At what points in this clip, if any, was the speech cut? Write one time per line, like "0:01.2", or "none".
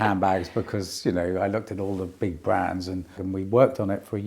0:03.1